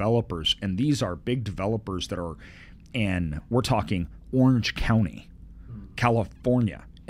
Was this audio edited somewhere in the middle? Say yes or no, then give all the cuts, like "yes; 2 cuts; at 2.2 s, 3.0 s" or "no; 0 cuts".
no; 0 cuts